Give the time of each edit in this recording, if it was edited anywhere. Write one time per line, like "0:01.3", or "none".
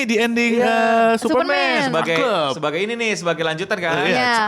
none